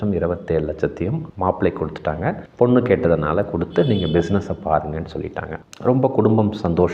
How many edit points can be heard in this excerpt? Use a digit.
0